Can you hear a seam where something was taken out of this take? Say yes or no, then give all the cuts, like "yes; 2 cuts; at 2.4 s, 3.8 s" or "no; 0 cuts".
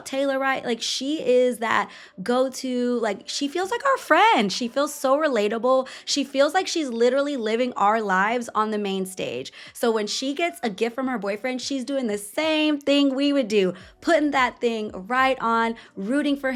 no; 0 cuts